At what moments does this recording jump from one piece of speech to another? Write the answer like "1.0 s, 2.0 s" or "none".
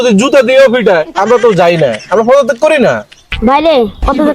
3.3 s